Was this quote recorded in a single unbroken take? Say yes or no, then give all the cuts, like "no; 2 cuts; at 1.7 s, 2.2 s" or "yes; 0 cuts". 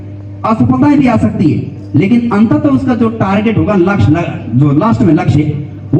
yes; 0 cuts